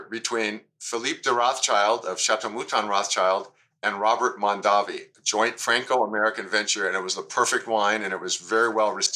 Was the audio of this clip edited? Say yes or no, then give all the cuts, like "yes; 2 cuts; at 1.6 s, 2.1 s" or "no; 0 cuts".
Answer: no; 0 cuts